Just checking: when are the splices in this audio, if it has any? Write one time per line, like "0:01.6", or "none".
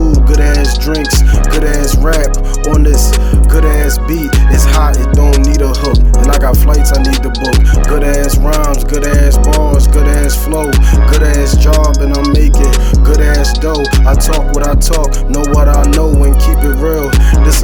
none